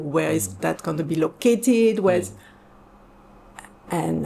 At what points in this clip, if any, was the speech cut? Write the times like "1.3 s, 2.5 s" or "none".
none